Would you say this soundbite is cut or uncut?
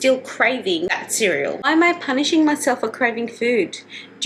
cut